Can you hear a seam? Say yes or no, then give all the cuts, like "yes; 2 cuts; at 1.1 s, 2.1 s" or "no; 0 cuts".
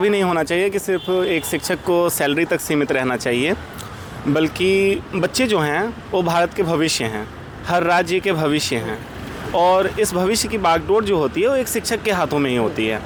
no; 0 cuts